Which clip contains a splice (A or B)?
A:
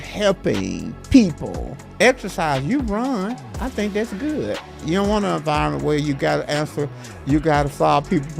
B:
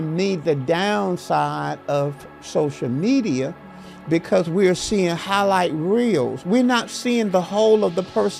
A